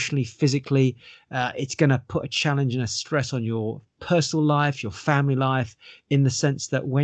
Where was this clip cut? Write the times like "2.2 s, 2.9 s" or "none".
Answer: none

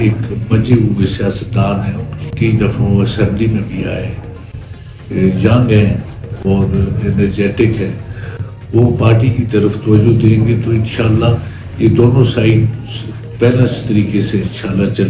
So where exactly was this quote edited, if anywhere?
none

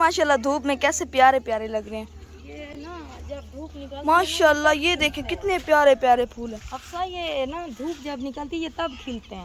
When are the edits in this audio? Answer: none

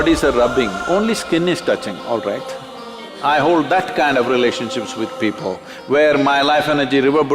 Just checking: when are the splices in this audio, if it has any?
3.1 s

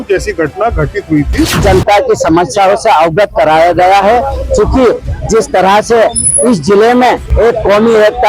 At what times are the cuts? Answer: 1.5 s, 7.3 s

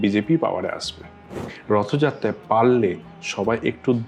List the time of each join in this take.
1.5 s

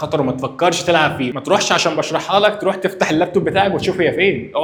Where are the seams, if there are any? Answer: none

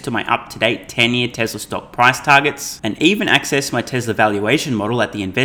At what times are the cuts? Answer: none

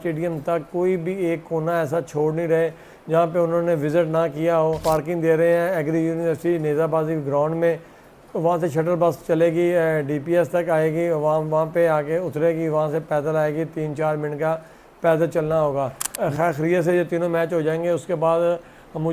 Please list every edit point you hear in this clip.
4.8 s, 16.1 s

